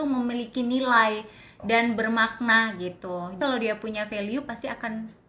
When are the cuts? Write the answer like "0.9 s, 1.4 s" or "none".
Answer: 3.4 s